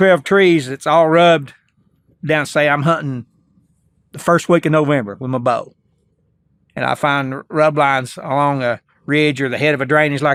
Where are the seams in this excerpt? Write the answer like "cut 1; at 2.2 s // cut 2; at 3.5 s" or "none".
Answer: none